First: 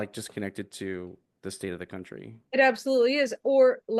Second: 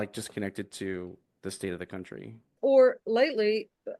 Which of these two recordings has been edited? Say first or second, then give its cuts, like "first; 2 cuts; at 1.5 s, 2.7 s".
second; 1 cut; at 2.5 s